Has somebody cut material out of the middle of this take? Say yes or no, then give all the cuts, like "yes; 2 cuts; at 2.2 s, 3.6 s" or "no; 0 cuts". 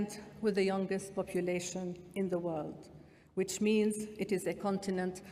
no; 0 cuts